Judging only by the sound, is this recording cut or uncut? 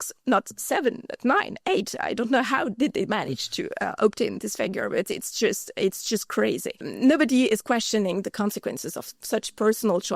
cut